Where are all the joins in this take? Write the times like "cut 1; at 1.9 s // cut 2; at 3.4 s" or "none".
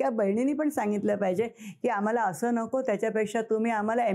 none